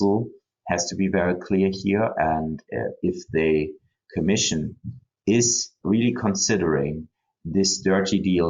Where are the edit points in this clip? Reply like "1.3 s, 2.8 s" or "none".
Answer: 5.8 s

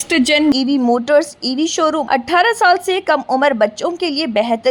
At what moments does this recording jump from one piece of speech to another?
2.0 s

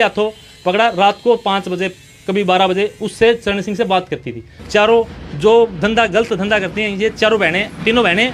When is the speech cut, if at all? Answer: 4.5 s

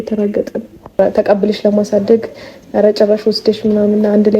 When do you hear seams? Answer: 1.0 s

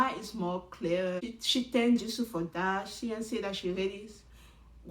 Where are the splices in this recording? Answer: 1.2 s

